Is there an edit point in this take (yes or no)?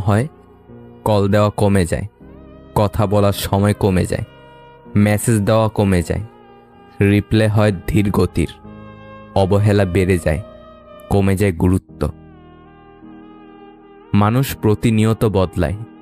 no